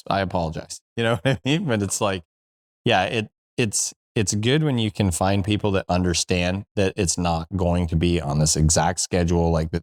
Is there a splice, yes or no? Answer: no